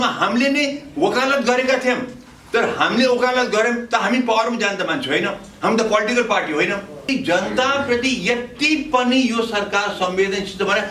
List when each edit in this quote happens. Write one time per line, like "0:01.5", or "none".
0:07.1